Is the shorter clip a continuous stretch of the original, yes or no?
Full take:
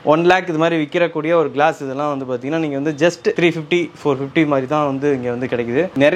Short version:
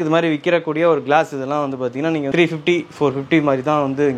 no